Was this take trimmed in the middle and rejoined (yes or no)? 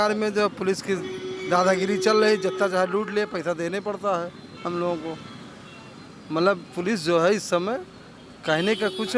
no